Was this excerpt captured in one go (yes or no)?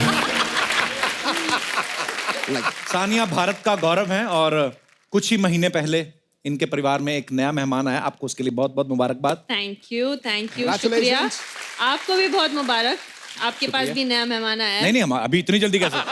no